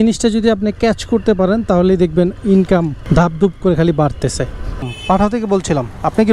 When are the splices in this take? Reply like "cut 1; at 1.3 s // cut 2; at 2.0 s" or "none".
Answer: cut 1; at 3.0 s // cut 2; at 4.9 s